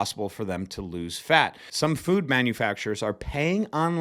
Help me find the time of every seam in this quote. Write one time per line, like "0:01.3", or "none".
0:01.6